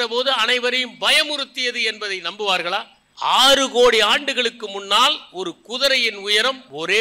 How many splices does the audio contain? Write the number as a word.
one